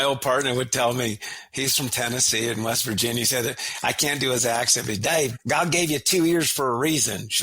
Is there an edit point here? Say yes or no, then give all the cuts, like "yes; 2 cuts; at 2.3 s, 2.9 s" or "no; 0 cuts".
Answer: yes; 1 cut; at 5.4 s